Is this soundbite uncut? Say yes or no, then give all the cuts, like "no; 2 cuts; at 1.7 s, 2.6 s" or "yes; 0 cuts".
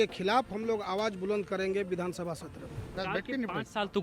no; 1 cut; at 3.0 s